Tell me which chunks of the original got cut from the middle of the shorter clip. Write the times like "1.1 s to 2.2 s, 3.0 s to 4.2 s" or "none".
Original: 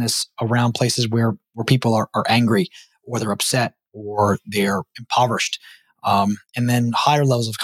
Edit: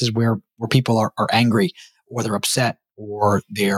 none